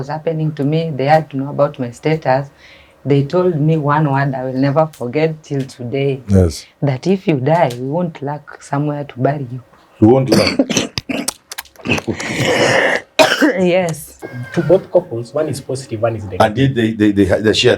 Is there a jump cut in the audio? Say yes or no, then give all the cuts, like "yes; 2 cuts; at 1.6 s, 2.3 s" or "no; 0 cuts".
yes; 1 cut; at 14.3 s